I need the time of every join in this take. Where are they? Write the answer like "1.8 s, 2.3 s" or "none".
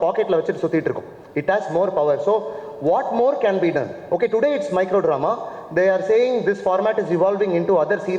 none